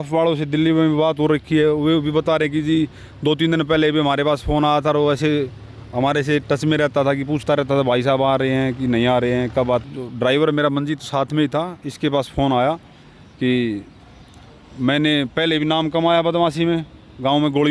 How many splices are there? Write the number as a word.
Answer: one